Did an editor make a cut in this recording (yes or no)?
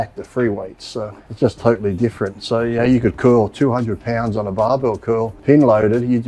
yes